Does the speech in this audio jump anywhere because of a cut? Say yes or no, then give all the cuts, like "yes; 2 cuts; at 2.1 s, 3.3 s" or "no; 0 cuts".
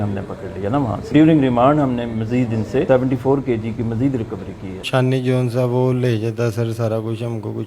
yes; 3 cuts; at 1.1 s, 2.9 s, 4.8 s